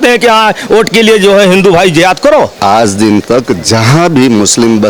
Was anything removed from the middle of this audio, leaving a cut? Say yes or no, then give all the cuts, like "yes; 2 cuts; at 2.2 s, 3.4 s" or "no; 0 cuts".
yes; 1 cut; at 2.5 s